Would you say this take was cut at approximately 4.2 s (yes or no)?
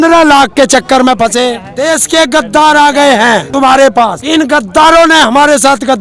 yes